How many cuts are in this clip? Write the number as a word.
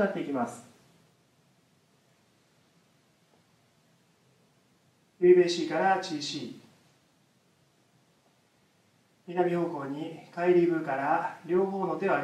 one